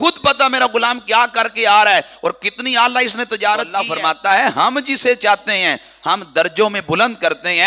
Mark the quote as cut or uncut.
cut